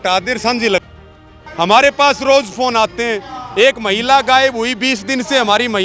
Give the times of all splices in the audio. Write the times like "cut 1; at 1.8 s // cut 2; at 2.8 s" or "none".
cut 1; at 1.4 s